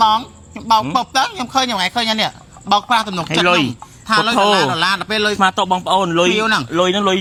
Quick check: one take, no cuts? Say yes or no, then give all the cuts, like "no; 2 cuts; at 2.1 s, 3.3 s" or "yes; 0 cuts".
yes; 0 cuts